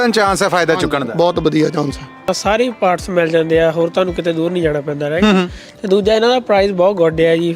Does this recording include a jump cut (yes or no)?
yes